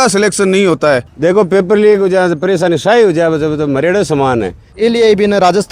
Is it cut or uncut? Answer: cut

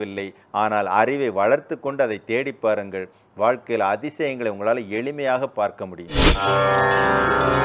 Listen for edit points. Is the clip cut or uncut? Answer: cut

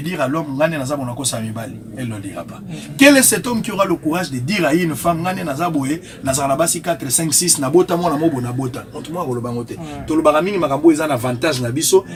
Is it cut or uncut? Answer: uncut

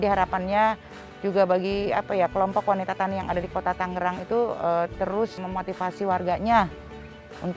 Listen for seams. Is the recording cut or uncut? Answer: cut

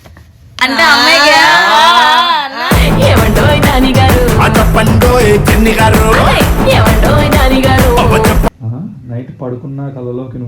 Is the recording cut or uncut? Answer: cut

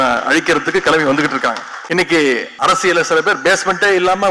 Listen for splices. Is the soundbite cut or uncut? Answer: cut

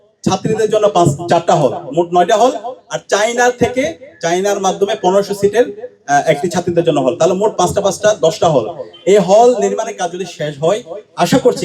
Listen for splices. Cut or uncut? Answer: uncut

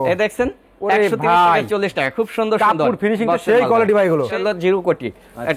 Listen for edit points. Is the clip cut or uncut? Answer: cut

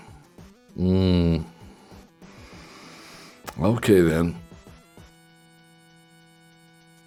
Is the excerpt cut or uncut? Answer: uncut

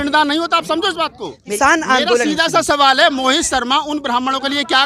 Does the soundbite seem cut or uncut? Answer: cut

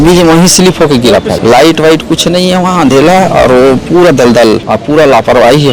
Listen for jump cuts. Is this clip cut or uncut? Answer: cut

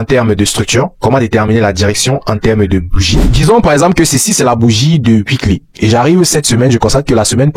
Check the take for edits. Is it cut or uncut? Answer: cut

